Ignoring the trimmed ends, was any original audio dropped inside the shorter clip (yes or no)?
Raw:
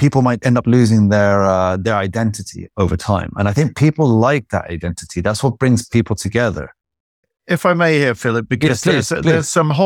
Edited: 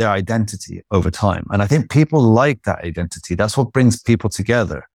no